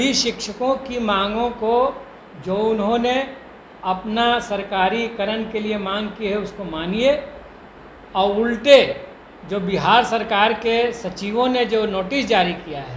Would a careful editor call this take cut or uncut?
uncut